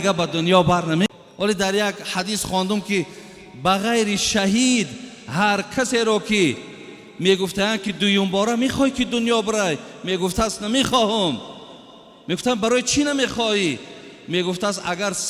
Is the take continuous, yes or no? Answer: no